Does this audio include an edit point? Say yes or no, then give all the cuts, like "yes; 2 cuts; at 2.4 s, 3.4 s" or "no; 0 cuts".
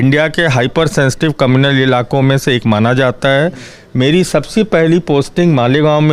no; 0 cuts